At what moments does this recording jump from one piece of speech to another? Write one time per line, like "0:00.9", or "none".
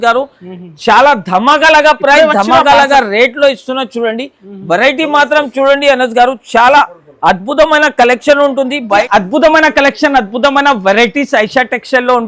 0:09.0